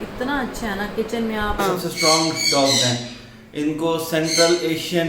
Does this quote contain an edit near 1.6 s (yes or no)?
yes